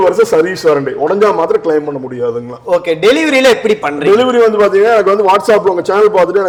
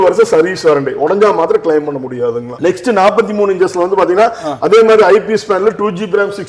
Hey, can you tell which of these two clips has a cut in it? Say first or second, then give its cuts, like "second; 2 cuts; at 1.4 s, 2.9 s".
second; 1 cut; at 2.6 s